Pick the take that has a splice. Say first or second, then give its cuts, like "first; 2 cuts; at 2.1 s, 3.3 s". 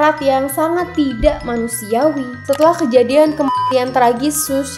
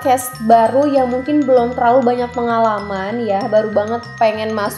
first; 1 cut; at 2.3 s